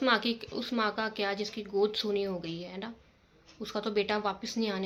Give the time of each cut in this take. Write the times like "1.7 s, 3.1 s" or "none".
none